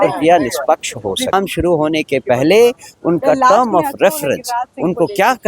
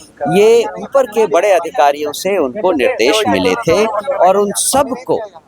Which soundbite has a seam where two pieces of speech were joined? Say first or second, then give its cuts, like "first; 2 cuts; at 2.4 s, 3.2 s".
first; 1 cut; at 1.3 s